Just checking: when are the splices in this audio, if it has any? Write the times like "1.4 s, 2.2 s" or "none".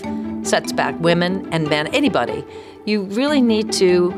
none